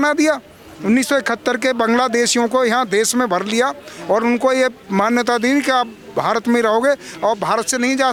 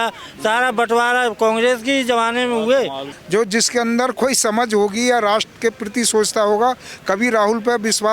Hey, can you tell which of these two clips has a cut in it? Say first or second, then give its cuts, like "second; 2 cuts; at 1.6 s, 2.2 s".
second; 1 cut; at 3.1 s